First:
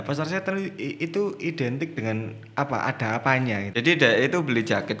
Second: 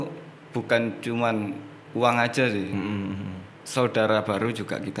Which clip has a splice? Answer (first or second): first